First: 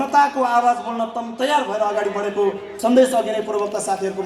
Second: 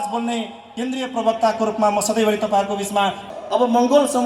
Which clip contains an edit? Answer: second; 1 cut; at 3.3 s

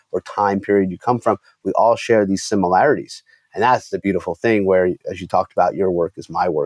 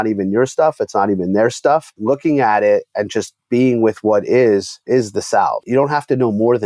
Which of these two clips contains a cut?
second; 3 cuts; at 1.9 s, 4.7 s, 5.6 s

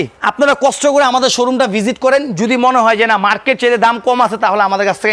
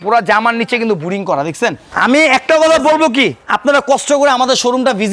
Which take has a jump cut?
second; 1 cut; at 1.9 s

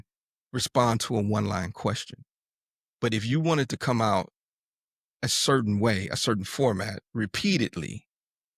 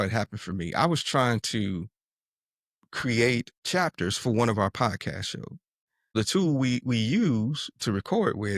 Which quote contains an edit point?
second; 2 cuts; at 3.5 s, 6.1 s

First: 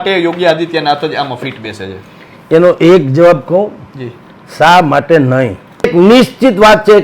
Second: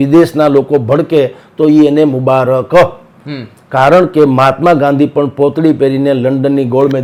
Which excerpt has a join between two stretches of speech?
first; 1 cut; at 5.9 s

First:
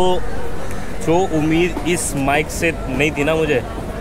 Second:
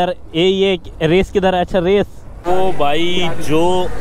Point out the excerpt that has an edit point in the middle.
second; 1 cut; at 2.3 s

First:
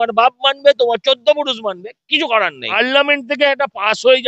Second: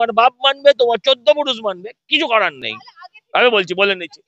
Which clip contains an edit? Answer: first; 1 cut; at 2.7 s

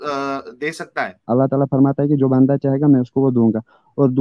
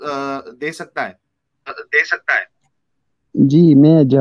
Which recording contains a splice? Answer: first; 1 cut; at 1.2 s

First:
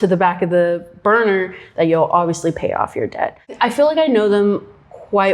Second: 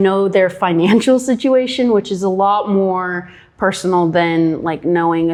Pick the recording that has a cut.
first; 1 cut; at 3.5 s

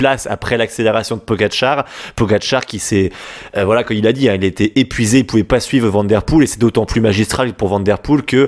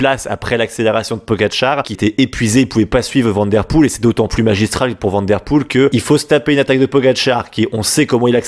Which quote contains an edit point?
second; 2 cuts; at 2.0 s, 5.9 s

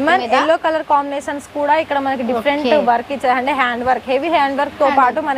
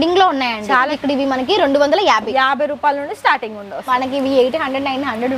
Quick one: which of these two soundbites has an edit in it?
second; 2 cuts; at 0.9 s, 3.8 s

